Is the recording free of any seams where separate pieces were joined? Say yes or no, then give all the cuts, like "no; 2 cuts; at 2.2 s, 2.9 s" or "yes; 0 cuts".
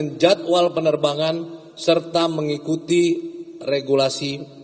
yes; 0 cuts